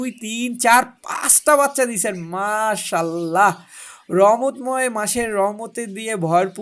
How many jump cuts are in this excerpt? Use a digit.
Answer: 0